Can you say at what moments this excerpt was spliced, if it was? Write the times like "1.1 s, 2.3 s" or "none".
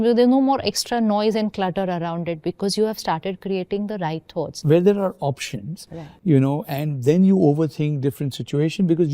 4.6 s